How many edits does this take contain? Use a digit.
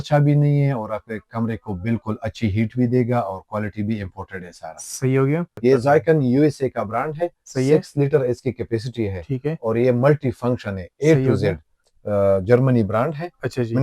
2